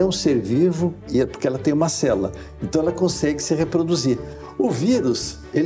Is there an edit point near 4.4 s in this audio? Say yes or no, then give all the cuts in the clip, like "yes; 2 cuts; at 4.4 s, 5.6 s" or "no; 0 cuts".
yes; 1 cut; at 4.4 s